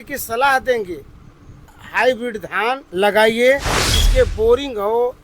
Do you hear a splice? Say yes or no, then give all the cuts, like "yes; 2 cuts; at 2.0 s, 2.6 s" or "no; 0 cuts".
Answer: yes; 3 cuts; at 1.8 s, 2.9 s, 4.0 s